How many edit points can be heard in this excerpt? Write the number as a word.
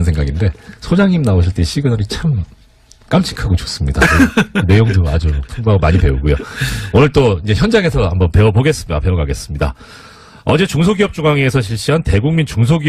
one